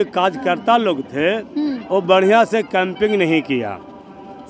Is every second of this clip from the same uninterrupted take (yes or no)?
yes